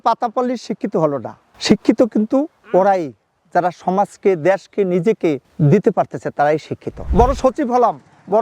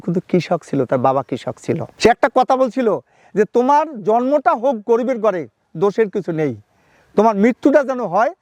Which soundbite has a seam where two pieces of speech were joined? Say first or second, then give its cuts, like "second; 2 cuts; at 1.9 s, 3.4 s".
first; 1 cut; at 6.9 s